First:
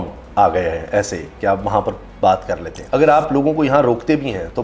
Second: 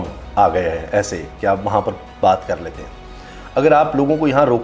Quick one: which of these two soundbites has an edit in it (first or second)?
first